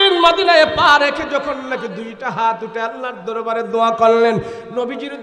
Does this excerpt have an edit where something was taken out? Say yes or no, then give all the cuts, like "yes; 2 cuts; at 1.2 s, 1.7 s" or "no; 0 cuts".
no; 0 cuts